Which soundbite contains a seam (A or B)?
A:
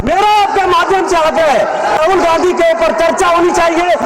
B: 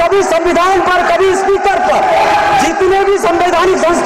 A